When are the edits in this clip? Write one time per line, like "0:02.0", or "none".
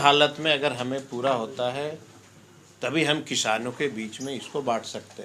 none